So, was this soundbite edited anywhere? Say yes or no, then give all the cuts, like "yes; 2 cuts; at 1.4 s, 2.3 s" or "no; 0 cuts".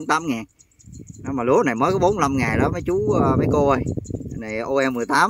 no; 0 cuts